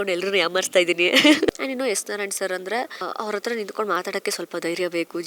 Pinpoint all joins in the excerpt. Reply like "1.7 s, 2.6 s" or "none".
1.5 s, 3.0 s